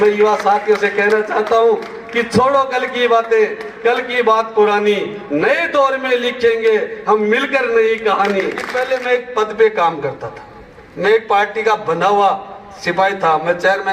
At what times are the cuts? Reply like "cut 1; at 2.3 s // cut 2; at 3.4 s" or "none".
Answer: cut 1; at 8.7 s